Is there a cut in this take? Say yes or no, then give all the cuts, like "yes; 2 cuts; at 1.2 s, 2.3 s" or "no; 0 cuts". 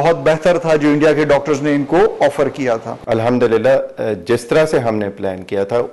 yes; 1 cut; at 3.0 s